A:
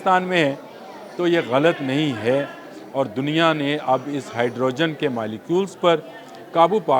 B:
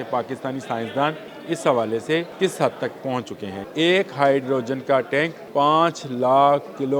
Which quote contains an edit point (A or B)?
B